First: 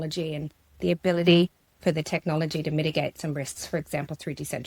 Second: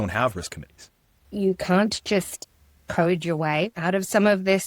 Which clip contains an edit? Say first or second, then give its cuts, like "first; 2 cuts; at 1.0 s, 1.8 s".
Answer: second; 2 cuts; at 1.2 s, 3.8 s